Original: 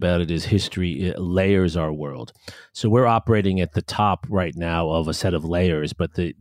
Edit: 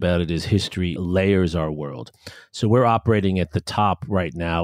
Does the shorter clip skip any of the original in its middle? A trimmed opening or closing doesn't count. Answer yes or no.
yes